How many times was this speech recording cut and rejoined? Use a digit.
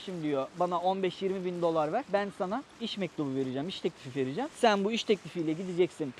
0